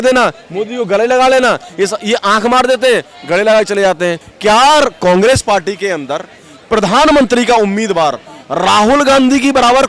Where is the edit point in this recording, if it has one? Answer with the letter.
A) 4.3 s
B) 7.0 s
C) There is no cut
A